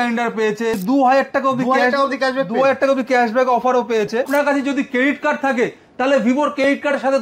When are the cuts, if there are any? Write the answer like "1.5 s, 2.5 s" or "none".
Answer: 0.7 s, 4.3 s